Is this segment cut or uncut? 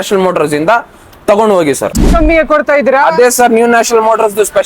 cut